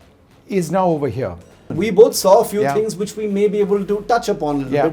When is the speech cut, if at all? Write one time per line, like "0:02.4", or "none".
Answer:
0:01.7